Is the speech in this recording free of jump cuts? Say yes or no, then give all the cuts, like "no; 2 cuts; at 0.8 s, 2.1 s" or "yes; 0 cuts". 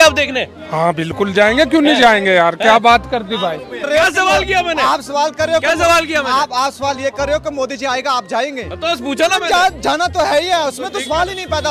no; 1 cut; at 3.7 s